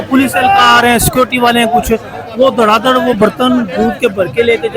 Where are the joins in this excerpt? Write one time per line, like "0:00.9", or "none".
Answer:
none